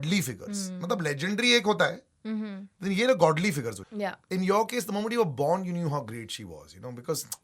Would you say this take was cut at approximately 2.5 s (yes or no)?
no